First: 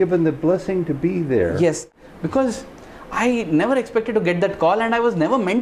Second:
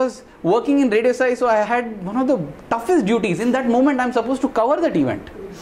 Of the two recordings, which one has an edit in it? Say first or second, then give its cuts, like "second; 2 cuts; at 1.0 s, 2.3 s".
first; 1 cut; at 1.8 s